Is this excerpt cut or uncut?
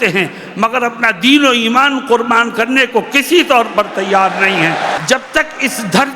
cut